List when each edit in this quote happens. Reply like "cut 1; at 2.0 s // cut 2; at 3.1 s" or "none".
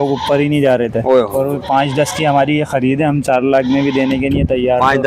none